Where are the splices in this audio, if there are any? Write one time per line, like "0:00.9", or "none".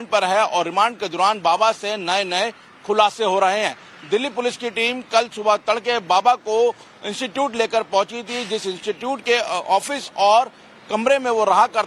0:09.4